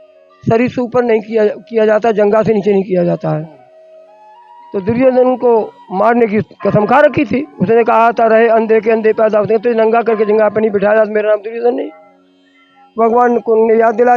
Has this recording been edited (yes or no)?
no